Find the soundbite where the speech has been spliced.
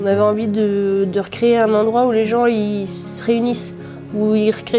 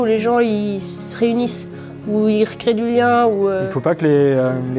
second; 1 cut; at 3.7 s

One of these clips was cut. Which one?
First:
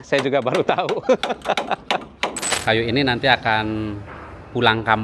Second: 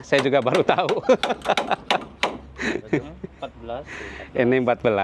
first; 1 cut; at 2.5 s

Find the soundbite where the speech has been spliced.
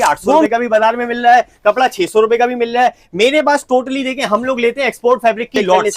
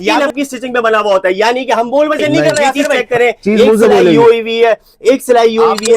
second; 1 cut; at 3.0 s

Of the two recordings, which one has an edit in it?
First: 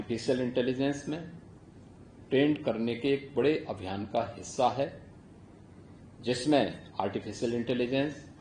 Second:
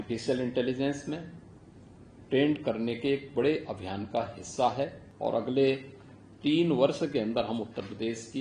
second; 1 cut; at 5.0 s

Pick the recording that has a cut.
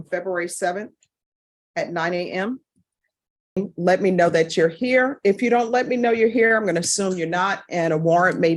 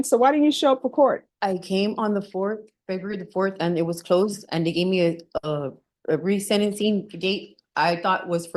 first; 1 cut; at 3.6 s

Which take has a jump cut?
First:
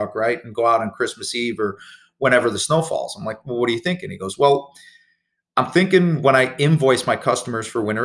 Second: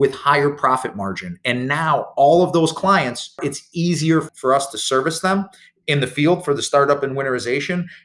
second; 2 cuts; at 3.4 s, 4.3 s

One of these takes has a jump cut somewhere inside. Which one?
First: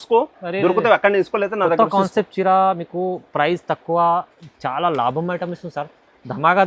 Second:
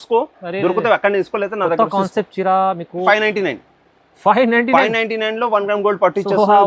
second; 1 cut; at 3.0 s

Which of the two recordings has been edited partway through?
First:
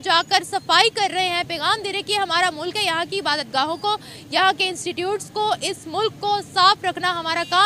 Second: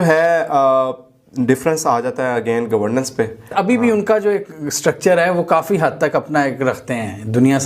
second; 1 cut; at 3.5 s

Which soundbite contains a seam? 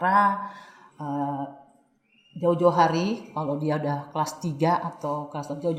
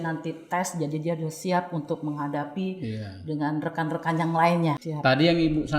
second; 1 cut; at 4.9 s

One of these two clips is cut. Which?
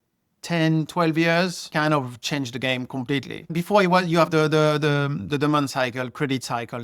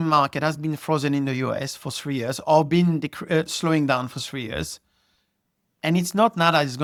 first; 2 cuts; at 1.6 s, 3.5 s

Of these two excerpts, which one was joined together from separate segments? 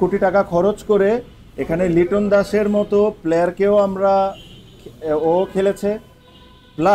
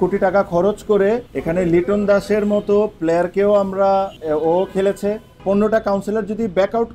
second; 3 cuts; at 1.3 s, 4.2 s, 5.3 s

